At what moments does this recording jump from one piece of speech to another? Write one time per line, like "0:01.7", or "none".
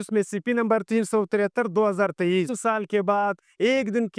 0:02.6

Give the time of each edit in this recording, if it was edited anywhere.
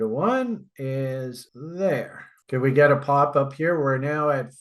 0:02.4

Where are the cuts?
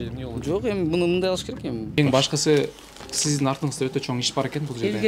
0:02.0

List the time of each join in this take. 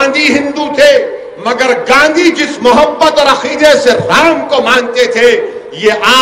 0:01.3

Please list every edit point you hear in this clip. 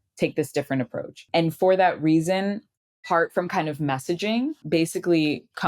0:01.3
0:03.0
0:04.6

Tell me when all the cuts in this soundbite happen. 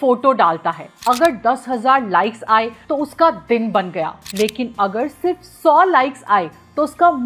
none

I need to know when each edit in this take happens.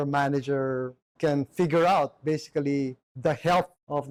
none

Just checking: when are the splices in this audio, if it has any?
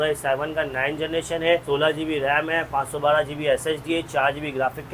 none

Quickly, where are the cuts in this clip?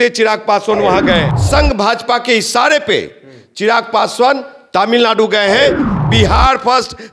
0:01.3
0:05.9

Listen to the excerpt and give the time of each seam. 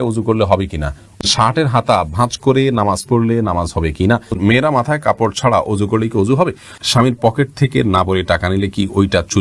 0:01.2
0:04.4
0:06.8

